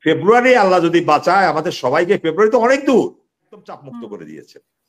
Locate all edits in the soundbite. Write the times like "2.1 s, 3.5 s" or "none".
3.8 s

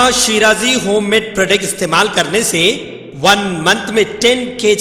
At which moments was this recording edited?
none

